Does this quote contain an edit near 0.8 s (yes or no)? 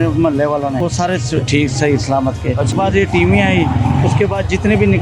yes